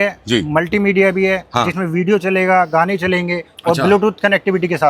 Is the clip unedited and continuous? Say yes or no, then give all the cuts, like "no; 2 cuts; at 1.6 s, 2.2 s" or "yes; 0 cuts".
yes; 0 cuts